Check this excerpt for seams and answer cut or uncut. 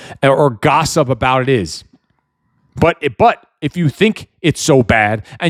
uncut